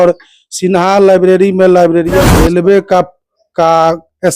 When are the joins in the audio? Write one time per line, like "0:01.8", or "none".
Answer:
0:02.3